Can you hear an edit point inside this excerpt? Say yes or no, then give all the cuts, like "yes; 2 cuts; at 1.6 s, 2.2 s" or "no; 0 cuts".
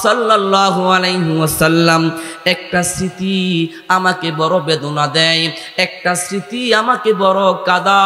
no; 0 cuts